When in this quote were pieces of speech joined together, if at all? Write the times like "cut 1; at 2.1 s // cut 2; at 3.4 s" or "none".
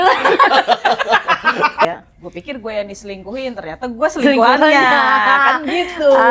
cut 1; at 1.8 s